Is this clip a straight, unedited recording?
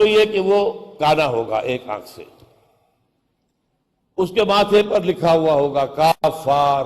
no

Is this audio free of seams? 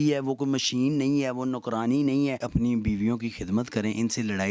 no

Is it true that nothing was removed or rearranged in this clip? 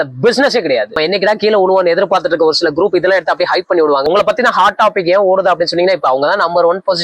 no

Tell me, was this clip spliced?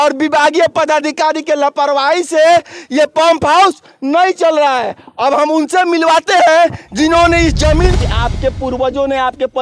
yes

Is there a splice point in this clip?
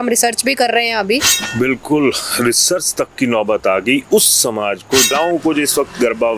yes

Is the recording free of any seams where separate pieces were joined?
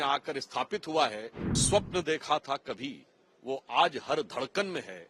no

